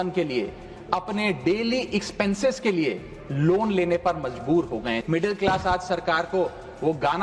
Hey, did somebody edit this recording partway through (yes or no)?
yes